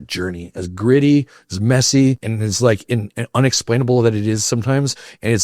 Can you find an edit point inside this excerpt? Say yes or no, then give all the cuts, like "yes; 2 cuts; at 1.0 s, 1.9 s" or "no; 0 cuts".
yes; 1 cut; at 2.3 s